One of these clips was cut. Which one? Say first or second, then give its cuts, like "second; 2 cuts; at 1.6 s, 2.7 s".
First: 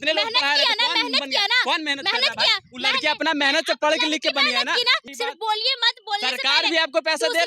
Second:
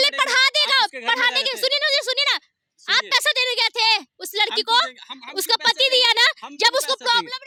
first; 1 cut; at 5.0 s